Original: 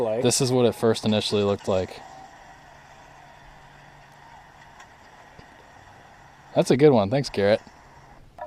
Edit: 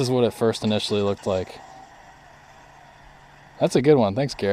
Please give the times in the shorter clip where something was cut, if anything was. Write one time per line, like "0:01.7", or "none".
0:03.5